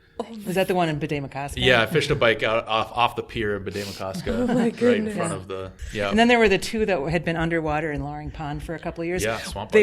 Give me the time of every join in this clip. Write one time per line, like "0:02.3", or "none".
0:05.8